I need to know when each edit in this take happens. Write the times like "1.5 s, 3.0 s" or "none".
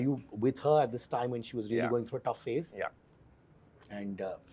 none

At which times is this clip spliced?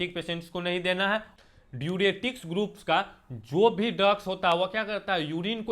1.4 s

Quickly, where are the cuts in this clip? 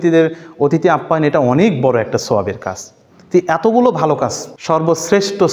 4.5 s

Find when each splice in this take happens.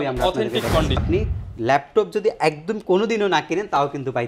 1.0 s

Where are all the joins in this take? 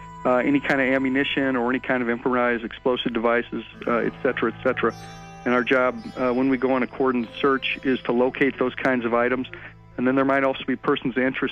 1.7 s

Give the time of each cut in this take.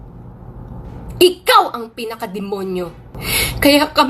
3.1 s

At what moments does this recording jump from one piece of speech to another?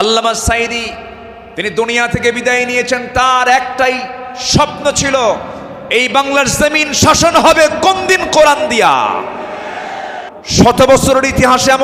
10.2 s

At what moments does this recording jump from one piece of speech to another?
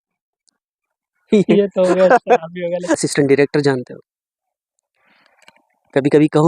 3.0 s

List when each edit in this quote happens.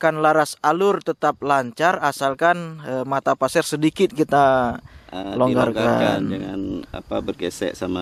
none

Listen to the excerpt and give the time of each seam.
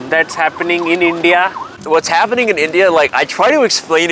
1.8 s

